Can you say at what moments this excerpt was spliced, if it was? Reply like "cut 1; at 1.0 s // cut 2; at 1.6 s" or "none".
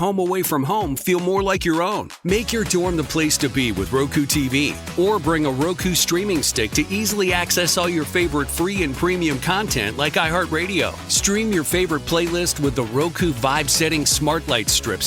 none